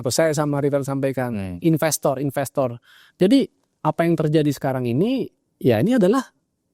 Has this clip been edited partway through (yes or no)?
no